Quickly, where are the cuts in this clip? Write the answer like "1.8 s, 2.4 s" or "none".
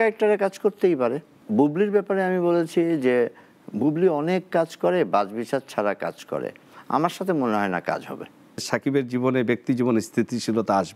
1.3 s, 8.6 s